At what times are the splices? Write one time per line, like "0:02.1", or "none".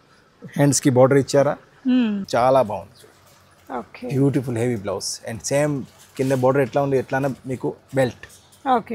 0:02.2